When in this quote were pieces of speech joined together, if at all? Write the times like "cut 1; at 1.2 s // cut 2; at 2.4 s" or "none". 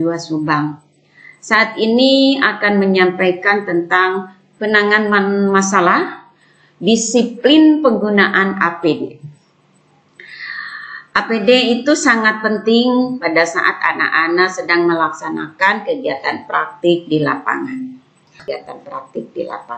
cut 1; at 18.4 s